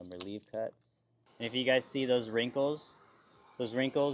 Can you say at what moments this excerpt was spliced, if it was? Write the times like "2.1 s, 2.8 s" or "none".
1.2 s

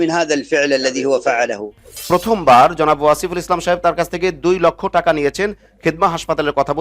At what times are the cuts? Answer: 2.0 s

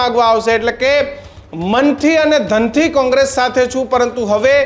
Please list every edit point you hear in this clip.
none

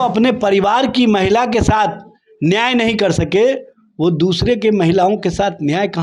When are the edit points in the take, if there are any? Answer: none

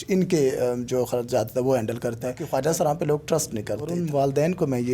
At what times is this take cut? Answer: 2.4 s, 3.9 s

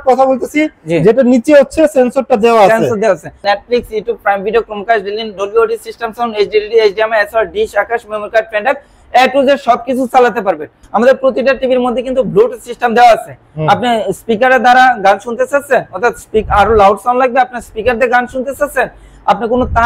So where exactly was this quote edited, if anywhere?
3.4 s, 10.7 s

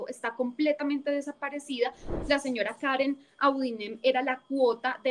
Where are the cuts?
2.0 s

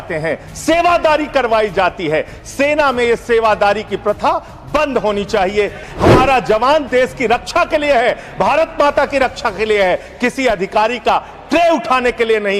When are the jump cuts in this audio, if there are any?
5.8 s

